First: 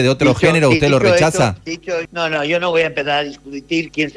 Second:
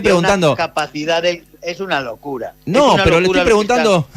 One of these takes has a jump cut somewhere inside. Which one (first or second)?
first